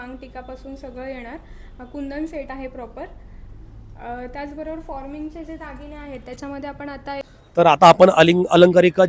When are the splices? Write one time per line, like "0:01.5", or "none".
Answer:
0:07.2